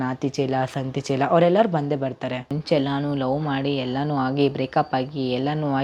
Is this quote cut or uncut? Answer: cut